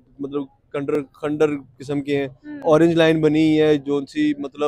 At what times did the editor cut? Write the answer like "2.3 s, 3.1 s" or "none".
none